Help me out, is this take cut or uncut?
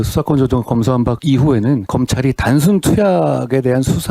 cut